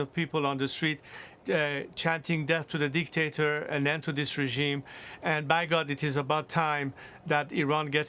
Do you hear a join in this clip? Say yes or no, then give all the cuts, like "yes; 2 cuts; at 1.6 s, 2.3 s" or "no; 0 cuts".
no; 0 cuts